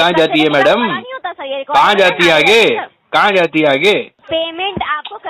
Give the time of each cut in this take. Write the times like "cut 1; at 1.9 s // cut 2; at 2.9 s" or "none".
cut 1; at 4.2 s